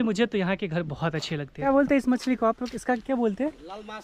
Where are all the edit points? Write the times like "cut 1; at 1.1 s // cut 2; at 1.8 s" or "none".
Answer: cut 1; at 1.5 s